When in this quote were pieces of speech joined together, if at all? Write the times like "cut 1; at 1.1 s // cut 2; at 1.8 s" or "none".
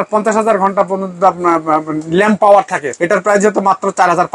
cut 1; at 2.9 s